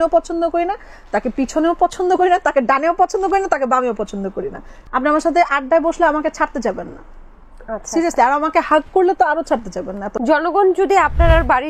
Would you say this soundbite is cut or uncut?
cut